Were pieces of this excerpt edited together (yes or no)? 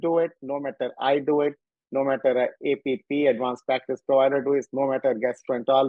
no